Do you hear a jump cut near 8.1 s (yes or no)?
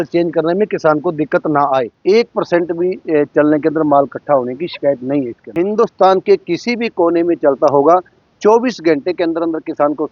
no